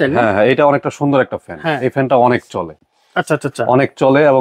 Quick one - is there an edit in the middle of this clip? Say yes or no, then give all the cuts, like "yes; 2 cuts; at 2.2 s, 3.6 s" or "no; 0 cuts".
no; 0 cuts